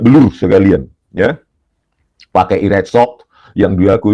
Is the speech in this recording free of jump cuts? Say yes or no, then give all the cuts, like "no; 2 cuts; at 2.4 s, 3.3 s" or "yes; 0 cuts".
yes; 0 cuts